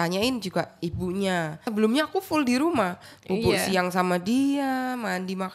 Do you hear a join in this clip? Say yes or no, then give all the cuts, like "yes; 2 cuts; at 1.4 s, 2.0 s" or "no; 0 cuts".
yes; 1 cut; at 1.6 s